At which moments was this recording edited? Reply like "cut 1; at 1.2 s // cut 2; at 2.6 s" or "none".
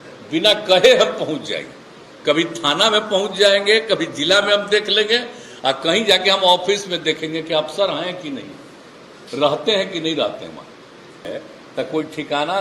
cut 1; at 11.3 s